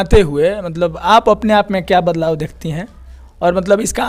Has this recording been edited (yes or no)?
no